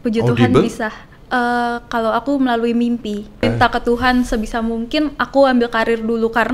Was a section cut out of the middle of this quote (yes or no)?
yes